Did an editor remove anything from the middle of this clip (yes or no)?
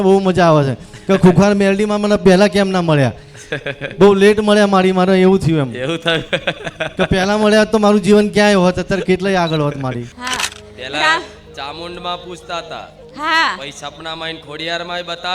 yes